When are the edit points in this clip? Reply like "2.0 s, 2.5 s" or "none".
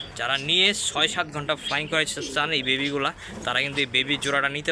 none